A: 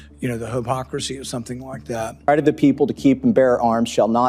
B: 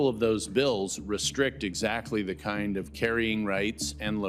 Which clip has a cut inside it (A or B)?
A